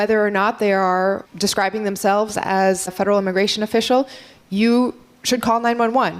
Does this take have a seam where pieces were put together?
yes; 2 cuts; at 1.3 s, 2.9 s

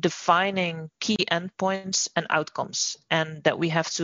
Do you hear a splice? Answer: no; 0 cuts

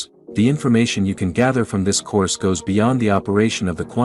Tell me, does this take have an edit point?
no; 0 cuts

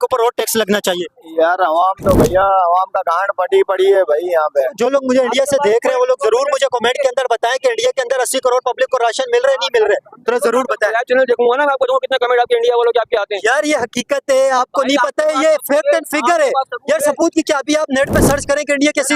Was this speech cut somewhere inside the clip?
yes; 1 cut; at 4.7 s

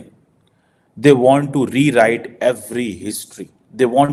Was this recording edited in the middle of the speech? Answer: no; 0 cuts

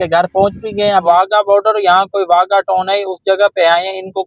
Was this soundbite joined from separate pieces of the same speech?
yes; 1 cut; at 1.0 s

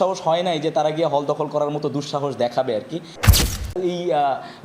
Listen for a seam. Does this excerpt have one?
yes; 1 cut; at 3.4 s

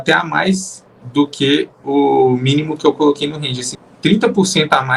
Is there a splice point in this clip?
yes; 1 cut; at 3.7 s

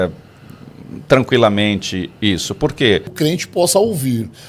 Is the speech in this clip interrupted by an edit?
yes; 1 cut; at 3.1 s

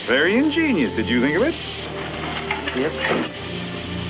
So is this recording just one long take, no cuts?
yes; 0 cuts

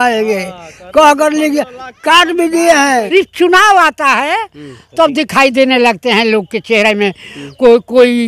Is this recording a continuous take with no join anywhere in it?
no; 1 cut; at 3.1 s

